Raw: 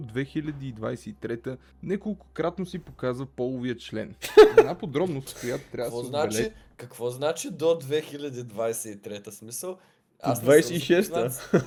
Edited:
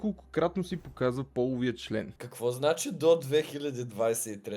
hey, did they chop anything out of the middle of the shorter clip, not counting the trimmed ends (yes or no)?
yes